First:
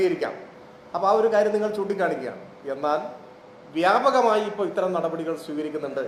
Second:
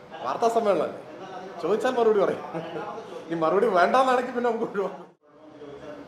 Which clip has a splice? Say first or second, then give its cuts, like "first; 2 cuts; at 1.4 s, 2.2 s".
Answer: second; 1 cut; at 5.0 s